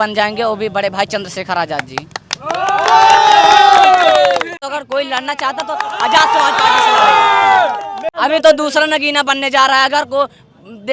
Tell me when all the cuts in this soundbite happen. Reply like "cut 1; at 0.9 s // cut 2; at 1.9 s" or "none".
cut 1; at 4.6 s // cut 2; at 8.1 s